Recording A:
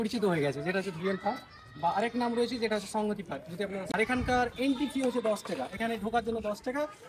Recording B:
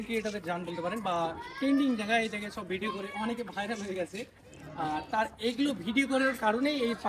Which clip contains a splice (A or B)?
A